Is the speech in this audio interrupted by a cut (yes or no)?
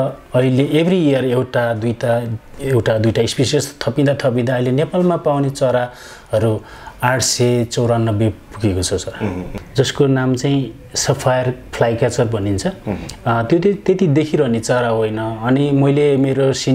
yes